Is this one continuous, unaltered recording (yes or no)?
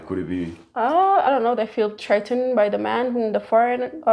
no